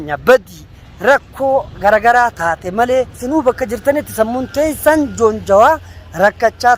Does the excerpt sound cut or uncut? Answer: cut